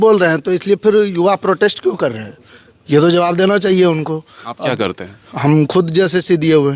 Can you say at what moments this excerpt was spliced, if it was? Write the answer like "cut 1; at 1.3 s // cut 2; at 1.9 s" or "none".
none

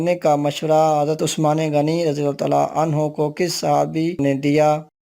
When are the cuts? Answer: cut 1; at 1.3 s // cut 2; at 4.2 s

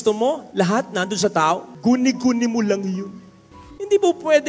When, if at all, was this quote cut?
cut 1; at 3.6 s

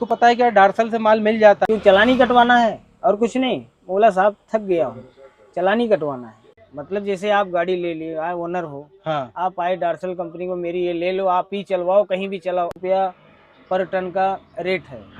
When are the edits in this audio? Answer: cut 1; at 1.6 s // cut 2; at 6.4 s // cut 3; at 12.8 s

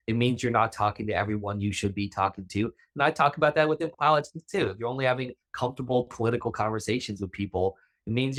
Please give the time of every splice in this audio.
none

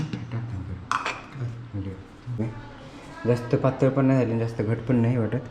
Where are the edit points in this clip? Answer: cut 1; at 2.4 s

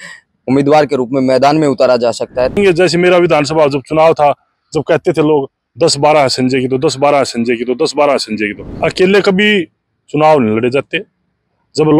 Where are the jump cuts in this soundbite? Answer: cut 1; at 2.6 s // cut 2; at 8.8 s

